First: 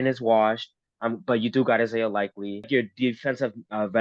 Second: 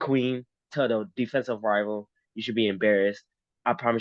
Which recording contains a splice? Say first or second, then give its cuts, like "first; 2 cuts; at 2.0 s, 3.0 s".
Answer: first; 1 cut; at 2.7 s